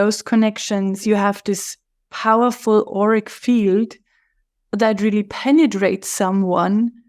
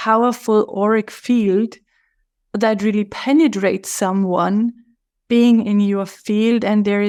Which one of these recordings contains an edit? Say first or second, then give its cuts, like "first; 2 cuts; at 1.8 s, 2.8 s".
first; 1 cut; at 1.0 s